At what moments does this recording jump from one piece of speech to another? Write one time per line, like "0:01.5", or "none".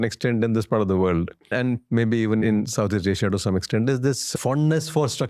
0:01.5
0:02.4
0:04.3